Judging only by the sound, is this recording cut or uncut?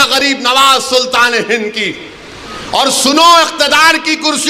uncut